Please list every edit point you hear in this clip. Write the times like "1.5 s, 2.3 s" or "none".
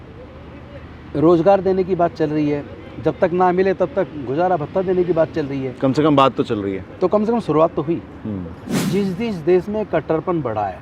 8.9 s